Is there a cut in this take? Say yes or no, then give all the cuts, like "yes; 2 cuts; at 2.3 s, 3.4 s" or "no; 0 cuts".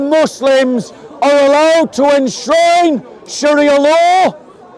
no; 0 cuts